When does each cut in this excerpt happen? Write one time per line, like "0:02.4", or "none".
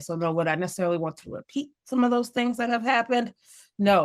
none